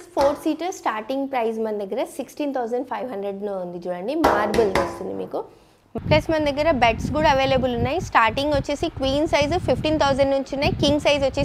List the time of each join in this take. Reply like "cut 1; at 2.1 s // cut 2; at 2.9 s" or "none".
cut 1; at 6.0 s